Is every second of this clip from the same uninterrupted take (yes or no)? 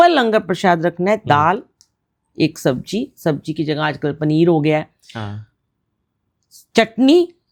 yes